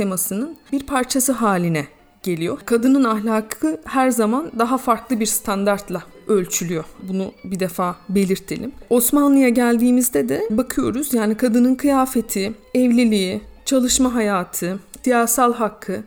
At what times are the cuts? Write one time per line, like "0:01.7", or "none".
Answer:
0:02.6